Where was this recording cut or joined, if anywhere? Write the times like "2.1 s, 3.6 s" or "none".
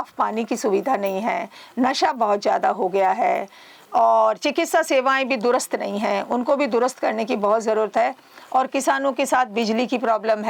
none